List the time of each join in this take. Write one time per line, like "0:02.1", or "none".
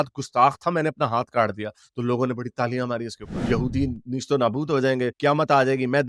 0:03.4